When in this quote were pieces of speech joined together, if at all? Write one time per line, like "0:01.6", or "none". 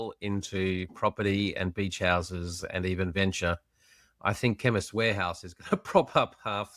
none